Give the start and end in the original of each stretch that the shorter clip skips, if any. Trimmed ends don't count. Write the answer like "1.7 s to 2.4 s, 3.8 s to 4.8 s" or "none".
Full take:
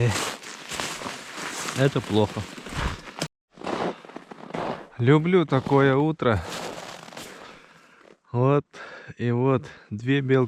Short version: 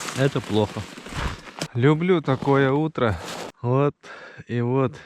3.2 s to 4.9 s, 6.7 s to 8.2 s